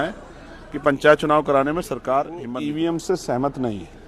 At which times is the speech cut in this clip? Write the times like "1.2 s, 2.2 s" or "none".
2.4 s